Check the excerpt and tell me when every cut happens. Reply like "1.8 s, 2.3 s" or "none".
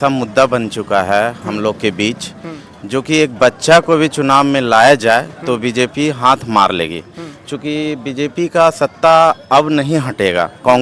none

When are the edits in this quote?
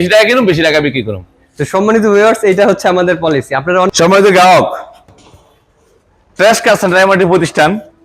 3.9 s

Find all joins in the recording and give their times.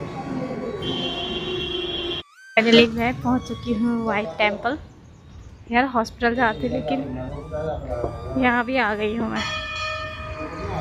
2.3 s

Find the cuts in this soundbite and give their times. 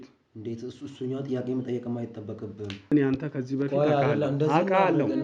2.9 s

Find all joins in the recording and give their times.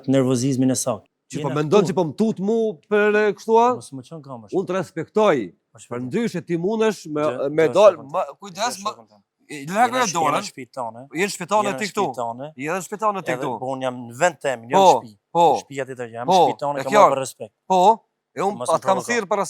1.0 s

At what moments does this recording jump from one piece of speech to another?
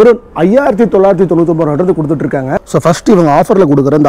2.6 s

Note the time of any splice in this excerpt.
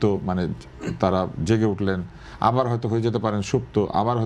none

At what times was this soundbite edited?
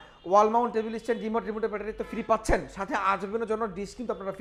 none

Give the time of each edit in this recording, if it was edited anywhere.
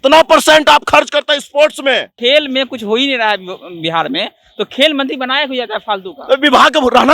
2.1 s

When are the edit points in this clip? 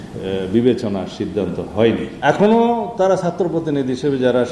2.1 s

